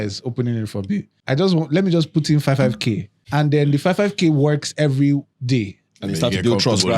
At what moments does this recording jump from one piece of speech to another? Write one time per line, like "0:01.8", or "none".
0:01.2
0:03.1